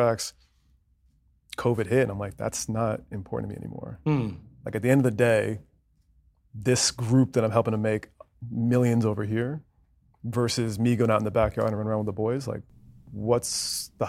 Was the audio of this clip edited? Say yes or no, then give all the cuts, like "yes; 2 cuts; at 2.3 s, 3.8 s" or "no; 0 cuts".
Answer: no; 0 cuts